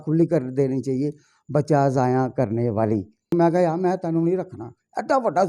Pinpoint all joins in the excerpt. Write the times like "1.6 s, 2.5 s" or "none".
3.3 s

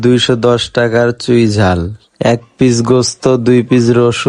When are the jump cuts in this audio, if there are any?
none

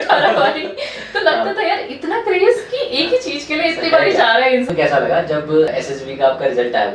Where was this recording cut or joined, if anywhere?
4.6 s, 5.7 s

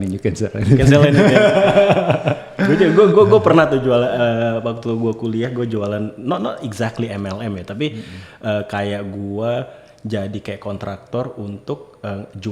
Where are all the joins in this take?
none

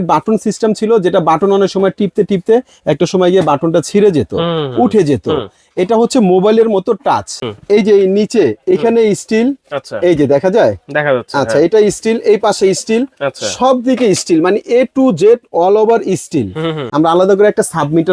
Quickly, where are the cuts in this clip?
7.4 s, 16.8 s

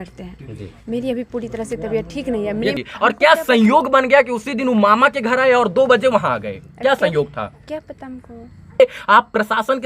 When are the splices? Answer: 2.8 s, 8.8 s

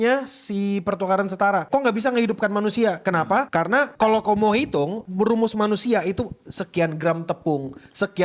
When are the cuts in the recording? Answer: 1.6 s, 3.2 s, 5.0 s

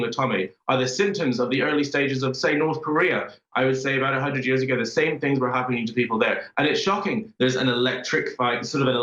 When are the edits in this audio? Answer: 7.3 s

